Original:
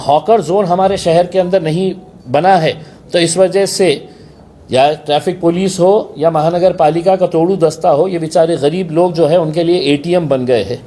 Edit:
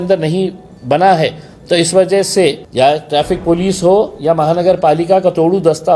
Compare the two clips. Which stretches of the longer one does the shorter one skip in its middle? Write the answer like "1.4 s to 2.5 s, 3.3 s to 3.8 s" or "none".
4.1 s to 4.6 s

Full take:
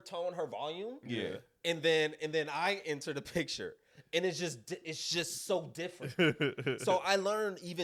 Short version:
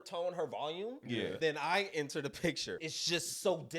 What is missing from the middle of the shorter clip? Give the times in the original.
1.4 s to 2.3 s, 3.8 s to 5.0 s

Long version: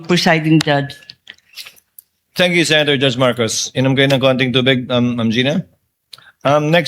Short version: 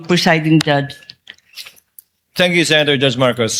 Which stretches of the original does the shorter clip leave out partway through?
none

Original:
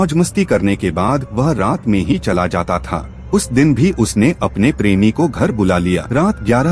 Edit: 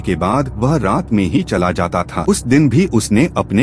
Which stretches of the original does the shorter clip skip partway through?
2.9 s to 3.2 s

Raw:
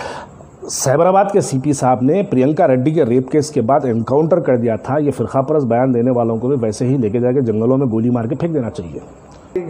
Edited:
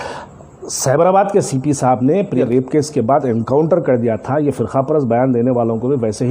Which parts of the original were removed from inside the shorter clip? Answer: 2.4 s to 3.0 s

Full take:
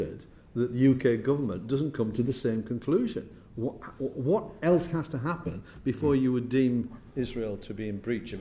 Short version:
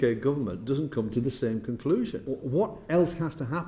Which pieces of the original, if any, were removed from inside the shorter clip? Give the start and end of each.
3.3 s to 4.0 s

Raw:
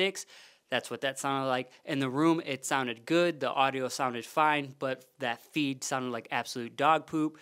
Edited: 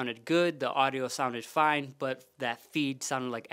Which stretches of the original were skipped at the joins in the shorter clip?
none

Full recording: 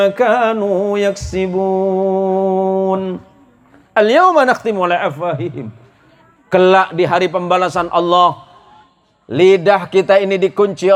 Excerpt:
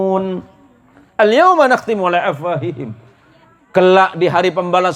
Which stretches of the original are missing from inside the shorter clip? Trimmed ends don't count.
none

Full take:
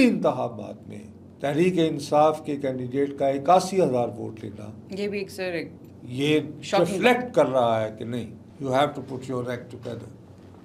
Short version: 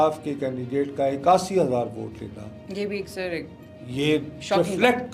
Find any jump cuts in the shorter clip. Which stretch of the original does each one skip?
none

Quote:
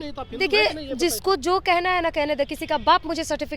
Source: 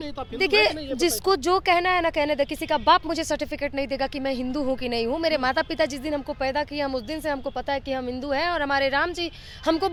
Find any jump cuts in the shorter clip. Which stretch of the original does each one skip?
none

